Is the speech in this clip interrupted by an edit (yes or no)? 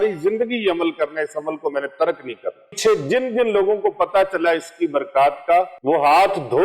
yes